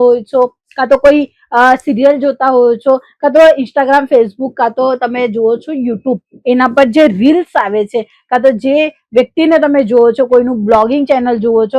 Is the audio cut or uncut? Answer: uncut